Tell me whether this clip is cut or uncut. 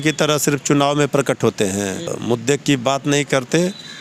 cut